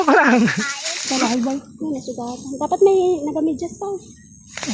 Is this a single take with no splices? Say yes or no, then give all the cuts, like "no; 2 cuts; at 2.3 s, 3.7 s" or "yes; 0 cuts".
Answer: no; 1 cut; at 1.1 s